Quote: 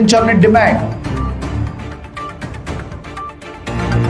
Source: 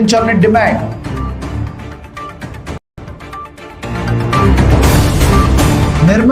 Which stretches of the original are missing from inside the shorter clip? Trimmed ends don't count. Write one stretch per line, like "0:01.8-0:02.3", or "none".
0:02.8-0:03.0